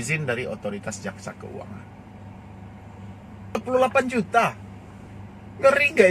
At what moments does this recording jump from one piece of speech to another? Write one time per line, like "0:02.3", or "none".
0:03.6

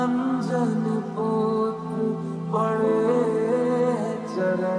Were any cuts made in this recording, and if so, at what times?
none

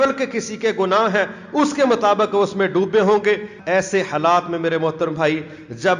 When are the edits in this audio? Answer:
0:03.5

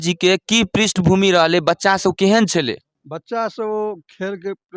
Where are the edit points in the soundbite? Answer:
none

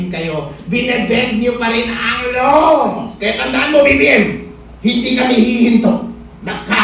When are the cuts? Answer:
0:03.1

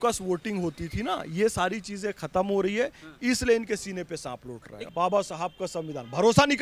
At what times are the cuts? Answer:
0:04.9

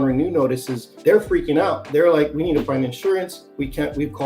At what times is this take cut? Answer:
0:00.9

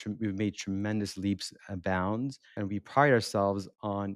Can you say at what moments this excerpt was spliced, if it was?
0:02.5

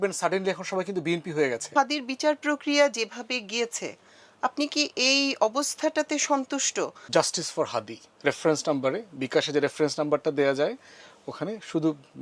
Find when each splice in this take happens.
0:01.7
0:07.0

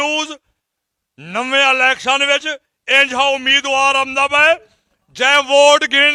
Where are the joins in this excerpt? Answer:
none

